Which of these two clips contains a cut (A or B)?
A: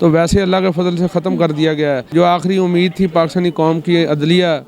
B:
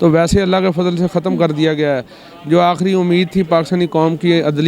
A